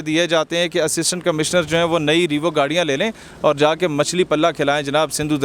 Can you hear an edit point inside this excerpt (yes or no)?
no